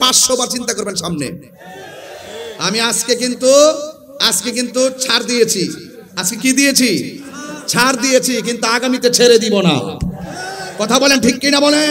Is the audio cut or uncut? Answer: uncut